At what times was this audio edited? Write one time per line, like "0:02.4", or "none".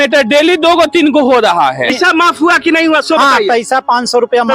0:01.9